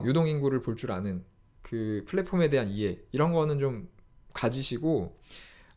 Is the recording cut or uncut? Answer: uncut